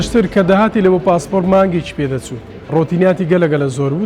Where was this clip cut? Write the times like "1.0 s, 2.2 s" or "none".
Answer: 2.7 s